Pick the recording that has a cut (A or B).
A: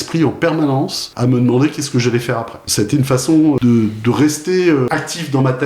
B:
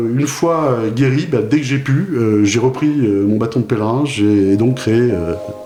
A